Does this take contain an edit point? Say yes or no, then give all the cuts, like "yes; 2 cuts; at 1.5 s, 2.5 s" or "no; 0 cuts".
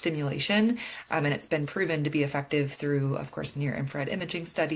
no; 0 cuts